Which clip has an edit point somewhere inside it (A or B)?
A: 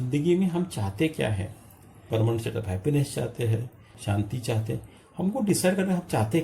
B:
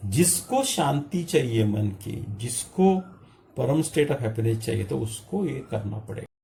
A